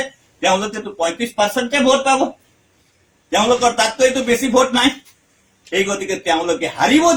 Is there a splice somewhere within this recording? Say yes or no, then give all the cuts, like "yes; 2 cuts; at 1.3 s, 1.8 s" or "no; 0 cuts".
no; 0 cuts